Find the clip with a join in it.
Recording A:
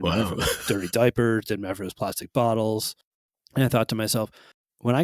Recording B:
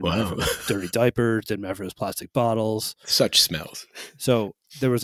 A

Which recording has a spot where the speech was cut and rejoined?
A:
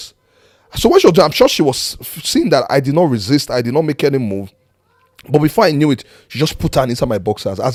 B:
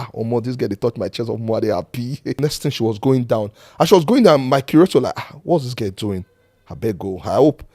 B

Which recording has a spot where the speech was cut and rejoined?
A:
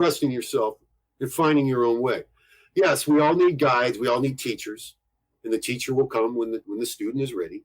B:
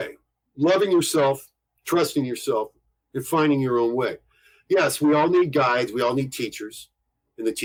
A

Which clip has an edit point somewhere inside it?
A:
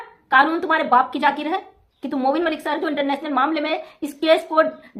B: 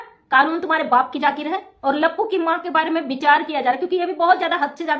B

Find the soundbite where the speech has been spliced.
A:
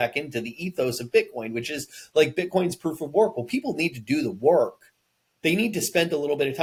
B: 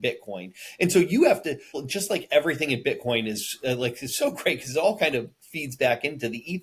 B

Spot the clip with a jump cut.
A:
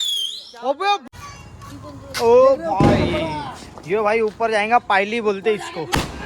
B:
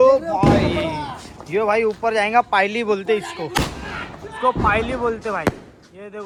A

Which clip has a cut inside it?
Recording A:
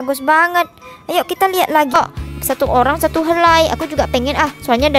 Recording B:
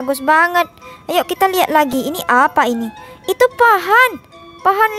A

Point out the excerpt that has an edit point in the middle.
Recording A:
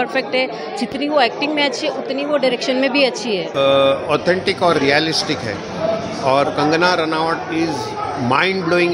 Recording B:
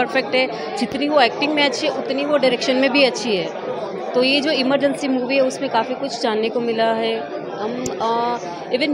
A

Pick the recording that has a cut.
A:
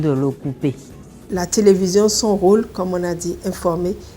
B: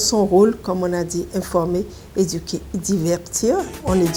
A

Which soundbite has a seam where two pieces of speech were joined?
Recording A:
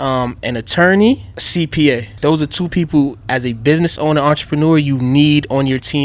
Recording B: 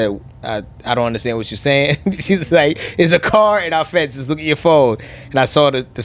A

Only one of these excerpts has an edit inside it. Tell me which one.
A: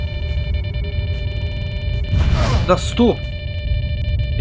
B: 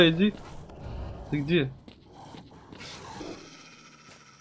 B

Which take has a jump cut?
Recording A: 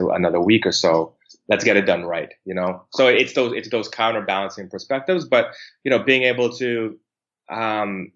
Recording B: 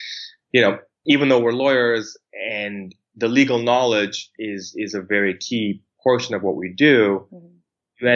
B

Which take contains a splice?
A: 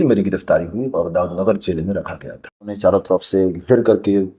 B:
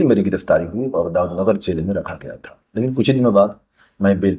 A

